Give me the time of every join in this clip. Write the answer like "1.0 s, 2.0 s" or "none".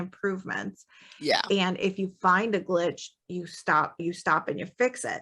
4.0 s